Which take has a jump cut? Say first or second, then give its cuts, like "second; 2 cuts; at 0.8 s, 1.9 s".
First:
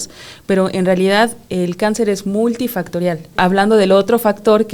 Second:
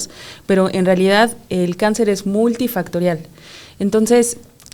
first; 1 cut; at 3.3 s